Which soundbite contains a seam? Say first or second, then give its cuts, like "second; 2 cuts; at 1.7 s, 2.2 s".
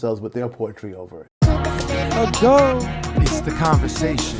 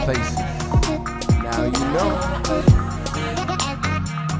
first; 1 cut; at 1.2 s